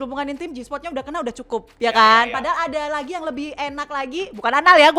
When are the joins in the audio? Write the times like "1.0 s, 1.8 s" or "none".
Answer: none